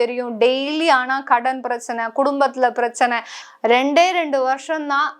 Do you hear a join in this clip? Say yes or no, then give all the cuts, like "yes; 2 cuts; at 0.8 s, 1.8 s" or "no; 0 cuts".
yes; 1 cut; at 3.4 s